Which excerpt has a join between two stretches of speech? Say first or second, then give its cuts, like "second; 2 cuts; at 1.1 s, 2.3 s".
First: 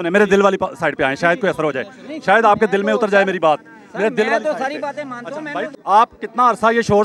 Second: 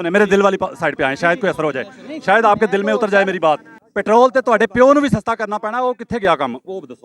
second; 1 cut; at 3.8 s